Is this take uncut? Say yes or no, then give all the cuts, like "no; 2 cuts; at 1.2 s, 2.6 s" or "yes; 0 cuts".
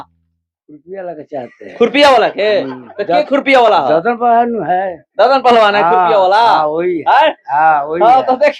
yes; 0 cuts